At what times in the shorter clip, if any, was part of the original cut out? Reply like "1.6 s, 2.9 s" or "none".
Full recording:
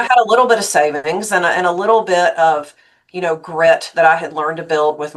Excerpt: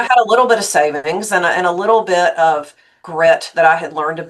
3.0 s

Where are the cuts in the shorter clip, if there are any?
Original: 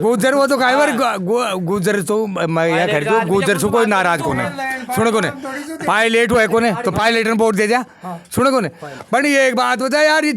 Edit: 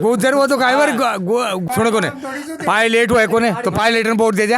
1.6 s

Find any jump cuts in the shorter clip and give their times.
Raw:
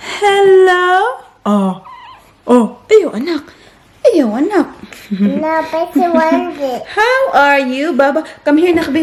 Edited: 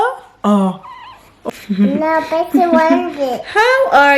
1.3 s

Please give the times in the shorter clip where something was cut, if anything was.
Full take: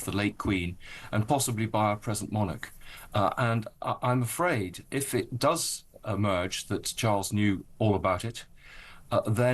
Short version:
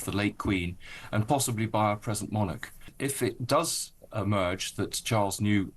2.9 s

